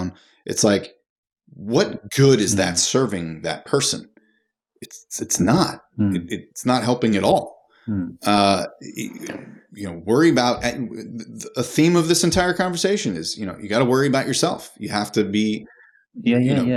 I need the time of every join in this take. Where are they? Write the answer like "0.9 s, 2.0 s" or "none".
none